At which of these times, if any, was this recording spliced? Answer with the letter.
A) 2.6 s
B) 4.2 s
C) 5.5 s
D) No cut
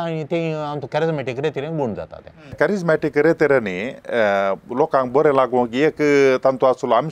A